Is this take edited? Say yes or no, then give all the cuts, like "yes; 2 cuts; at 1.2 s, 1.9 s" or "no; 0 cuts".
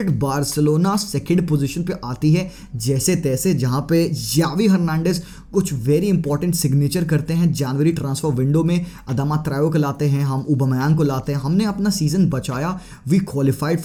no; 0 cuts